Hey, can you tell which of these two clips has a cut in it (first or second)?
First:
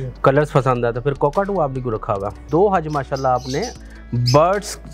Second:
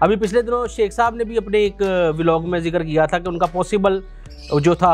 first